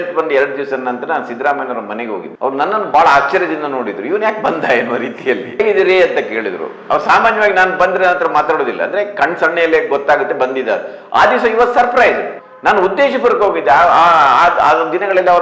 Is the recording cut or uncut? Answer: uncut